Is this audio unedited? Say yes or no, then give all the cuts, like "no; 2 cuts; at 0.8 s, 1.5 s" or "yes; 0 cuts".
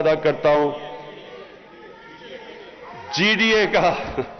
yes; 0 cuts